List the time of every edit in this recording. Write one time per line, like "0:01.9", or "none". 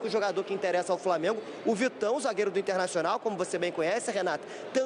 none